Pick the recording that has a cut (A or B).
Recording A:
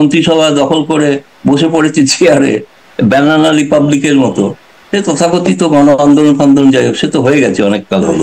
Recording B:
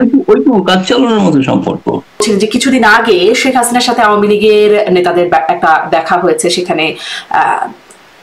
B